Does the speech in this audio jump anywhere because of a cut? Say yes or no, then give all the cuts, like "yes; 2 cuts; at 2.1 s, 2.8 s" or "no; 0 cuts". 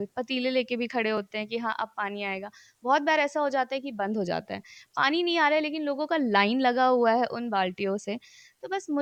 no; 0 cuts